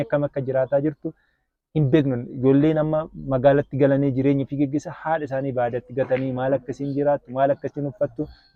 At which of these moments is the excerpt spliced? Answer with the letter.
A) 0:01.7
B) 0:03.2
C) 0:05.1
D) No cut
D